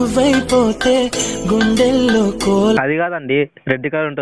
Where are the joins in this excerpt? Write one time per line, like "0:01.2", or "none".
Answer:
0:02.8